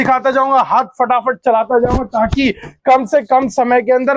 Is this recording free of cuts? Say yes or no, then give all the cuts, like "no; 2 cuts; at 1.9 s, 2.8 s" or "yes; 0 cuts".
yes; 0 cuts